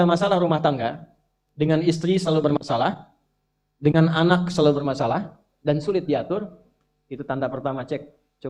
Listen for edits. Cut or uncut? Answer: uncut